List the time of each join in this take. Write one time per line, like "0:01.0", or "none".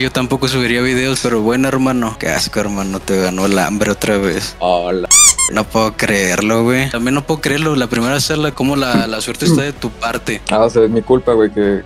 0:02.1
0:06.9